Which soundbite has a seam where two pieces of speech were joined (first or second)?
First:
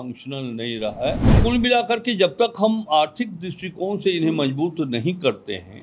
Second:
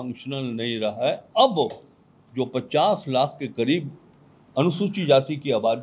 first